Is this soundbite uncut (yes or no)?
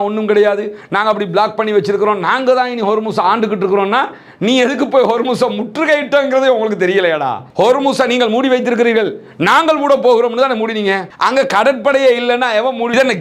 yes